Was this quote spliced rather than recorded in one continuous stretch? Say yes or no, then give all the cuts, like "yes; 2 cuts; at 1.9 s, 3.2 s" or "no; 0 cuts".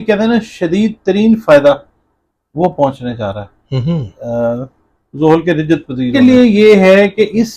yes; 1 cut; at 6.1 s